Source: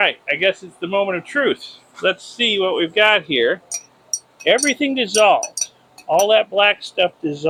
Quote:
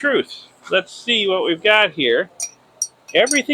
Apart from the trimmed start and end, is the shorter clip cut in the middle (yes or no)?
no